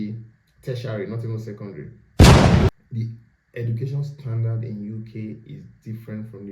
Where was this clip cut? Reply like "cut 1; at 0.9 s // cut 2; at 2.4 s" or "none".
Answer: cut 1; at 1.9 s // cut 2; at 2.7 s

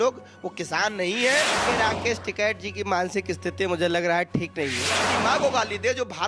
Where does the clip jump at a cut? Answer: cut 1; at 1.6 s // cut 2; at 5.1 s

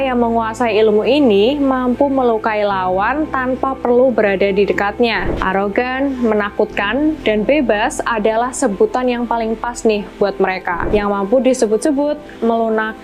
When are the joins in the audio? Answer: cut 1; at 5.3 s // cut 2; at 10.8 s

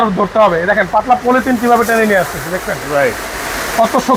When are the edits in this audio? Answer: none

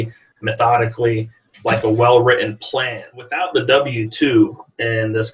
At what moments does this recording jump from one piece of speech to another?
cut 1; at 3.1 s

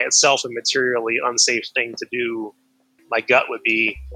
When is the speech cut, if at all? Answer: cut 1; at 3.0 s

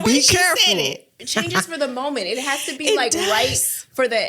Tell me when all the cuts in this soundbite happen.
cut 1; at 1.1 s

